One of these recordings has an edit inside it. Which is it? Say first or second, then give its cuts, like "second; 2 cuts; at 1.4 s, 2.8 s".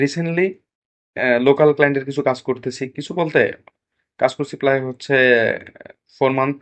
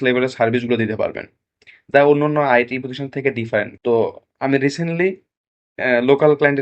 second; 1 cut; at 3.7 s